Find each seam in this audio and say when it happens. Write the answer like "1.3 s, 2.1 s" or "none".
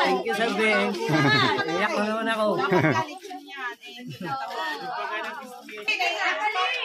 5.9 s